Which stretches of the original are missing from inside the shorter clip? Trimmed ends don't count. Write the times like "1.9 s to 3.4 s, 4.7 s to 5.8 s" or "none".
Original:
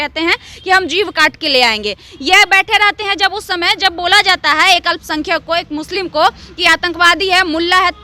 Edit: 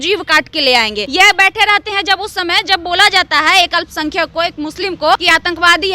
1.9 s to 2.1 s, 6.3 s to 6.6 s